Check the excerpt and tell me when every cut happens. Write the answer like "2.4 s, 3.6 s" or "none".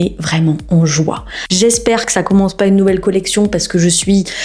1.4 s